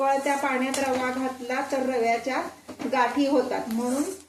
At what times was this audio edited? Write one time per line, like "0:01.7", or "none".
none